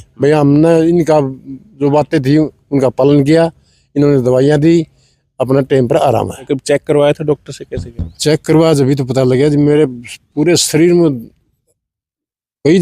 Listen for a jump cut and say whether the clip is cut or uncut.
cut